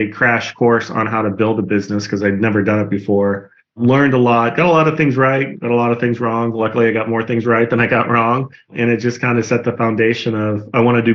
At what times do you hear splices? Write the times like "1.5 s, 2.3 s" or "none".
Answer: none